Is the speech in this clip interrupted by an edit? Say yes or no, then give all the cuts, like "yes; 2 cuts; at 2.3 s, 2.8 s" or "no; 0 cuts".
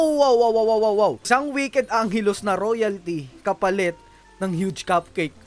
yes; 1 cut; at 1.2 s